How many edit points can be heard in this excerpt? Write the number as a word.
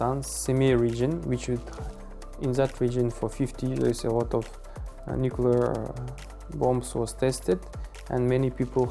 zero